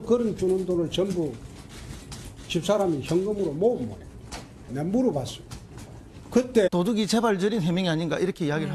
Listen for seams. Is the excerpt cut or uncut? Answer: uncut